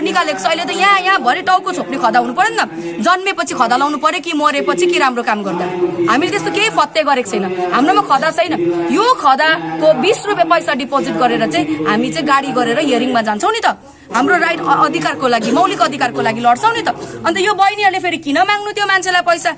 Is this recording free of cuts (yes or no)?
yes